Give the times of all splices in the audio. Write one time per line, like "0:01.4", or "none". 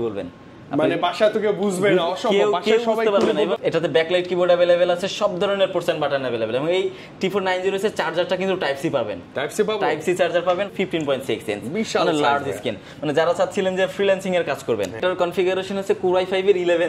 0:03.5
0:10.7
0:15.0

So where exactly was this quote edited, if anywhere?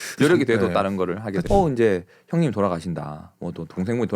0:01.4

